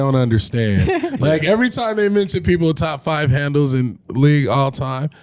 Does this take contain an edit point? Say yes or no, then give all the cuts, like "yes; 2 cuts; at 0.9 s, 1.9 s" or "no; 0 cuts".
no; 0 cuts